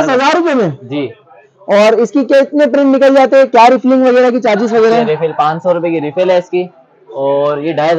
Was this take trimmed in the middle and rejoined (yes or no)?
no